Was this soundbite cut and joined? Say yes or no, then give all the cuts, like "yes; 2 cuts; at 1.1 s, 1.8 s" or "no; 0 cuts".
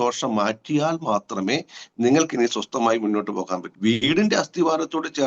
yes; 1 cut; at 3.6 s